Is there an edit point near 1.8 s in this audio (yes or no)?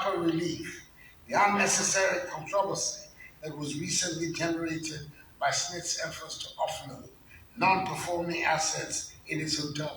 no